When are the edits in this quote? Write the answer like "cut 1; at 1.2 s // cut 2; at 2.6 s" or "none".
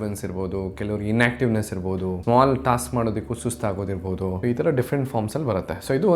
cut 1; at 2.2 s // cut 2; at 4.4 s